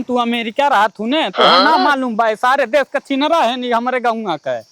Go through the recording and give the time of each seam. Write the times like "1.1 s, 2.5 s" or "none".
none